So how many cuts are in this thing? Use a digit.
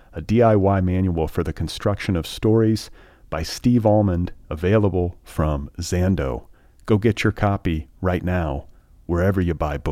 0